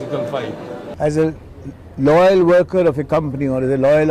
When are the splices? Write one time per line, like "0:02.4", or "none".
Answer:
0:00.9